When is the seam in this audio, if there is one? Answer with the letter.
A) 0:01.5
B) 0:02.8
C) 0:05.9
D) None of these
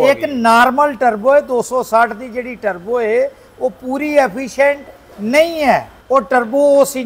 C